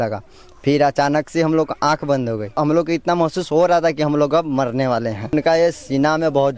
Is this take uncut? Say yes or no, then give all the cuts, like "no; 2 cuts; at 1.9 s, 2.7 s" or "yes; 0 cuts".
no; 2 cuts; at 2.5 s, 5.3 s